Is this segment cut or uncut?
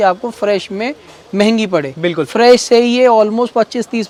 uncut